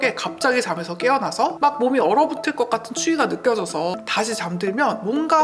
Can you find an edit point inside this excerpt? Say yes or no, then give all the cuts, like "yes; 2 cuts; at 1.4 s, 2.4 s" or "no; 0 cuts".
yes; 2 cuts; at 1.5 s, 4.0 s